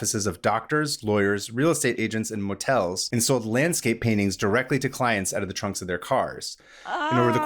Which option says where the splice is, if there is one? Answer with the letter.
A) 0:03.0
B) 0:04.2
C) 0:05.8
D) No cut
A